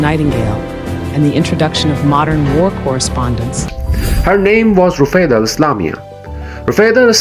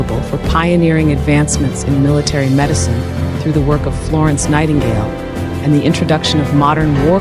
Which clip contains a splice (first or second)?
first